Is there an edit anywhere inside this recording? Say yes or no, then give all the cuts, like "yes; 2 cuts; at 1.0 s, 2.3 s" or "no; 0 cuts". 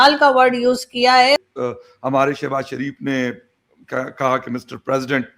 yes; 1 cut; at 1.4 s